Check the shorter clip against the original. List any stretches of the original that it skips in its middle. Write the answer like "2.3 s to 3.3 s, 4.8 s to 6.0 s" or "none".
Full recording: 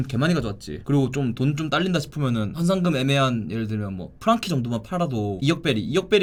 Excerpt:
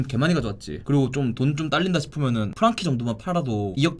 2.5 s to 4.1 s